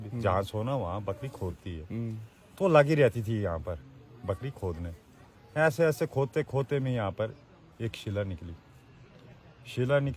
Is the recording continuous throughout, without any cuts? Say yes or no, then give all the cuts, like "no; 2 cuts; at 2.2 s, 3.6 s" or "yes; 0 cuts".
yes; 0 cuts